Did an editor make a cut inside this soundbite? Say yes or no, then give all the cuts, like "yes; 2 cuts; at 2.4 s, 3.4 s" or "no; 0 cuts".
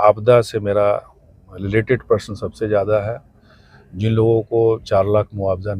no; 0 cuts